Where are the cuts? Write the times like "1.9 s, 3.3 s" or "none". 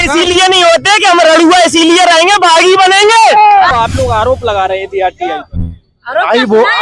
3.7 s